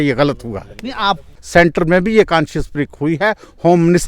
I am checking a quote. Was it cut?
yes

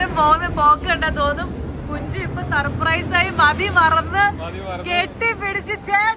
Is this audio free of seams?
yes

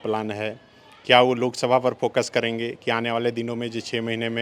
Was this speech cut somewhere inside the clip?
no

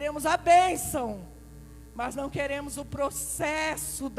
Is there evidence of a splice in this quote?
no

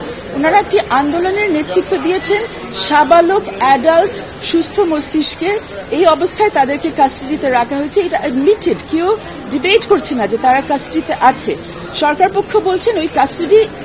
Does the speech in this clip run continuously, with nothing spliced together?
yes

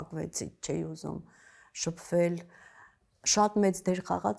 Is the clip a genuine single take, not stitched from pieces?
yes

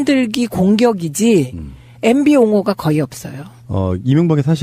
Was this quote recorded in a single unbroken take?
no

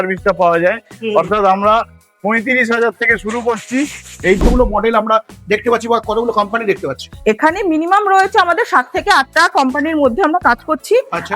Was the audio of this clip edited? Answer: yes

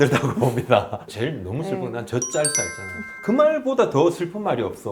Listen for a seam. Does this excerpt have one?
yes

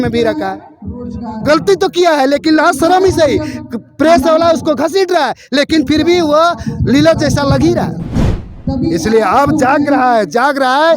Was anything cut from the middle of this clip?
yes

